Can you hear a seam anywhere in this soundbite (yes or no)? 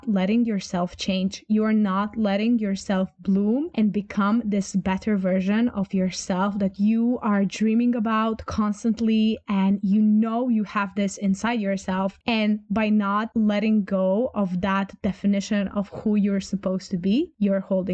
yes